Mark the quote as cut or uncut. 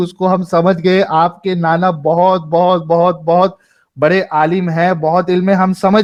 uncut